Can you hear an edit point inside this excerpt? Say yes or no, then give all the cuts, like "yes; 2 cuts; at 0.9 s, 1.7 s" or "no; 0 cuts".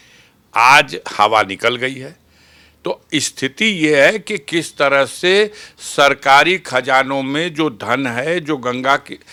no; 0 cuts